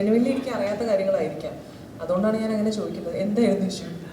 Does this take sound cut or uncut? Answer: uncut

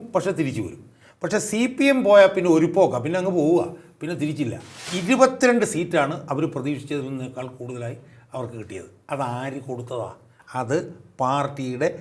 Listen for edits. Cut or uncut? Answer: cut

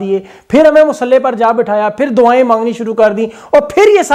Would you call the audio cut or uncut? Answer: uncut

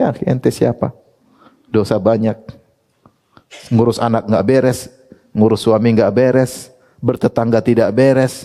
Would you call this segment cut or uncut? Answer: uncut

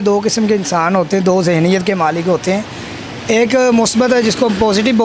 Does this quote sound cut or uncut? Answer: uncut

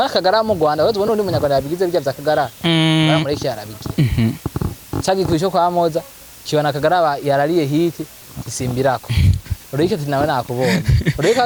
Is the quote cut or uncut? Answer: uncut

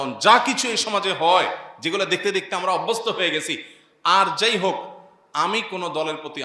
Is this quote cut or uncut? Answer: uncut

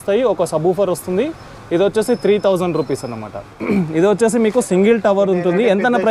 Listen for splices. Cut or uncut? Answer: cut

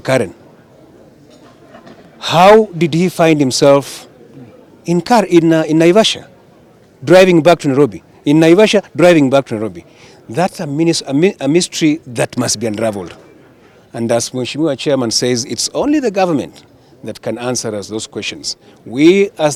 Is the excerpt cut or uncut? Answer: uncut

